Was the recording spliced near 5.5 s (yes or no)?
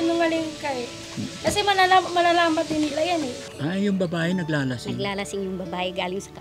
no